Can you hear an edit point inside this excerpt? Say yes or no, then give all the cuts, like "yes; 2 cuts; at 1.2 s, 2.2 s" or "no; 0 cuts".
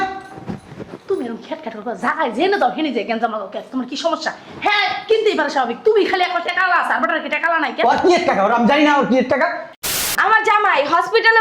yes; 1 cut; at 9.7 s